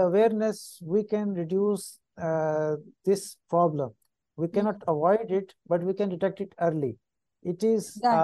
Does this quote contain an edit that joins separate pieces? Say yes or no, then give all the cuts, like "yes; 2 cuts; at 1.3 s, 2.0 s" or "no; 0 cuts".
no; 0 cuts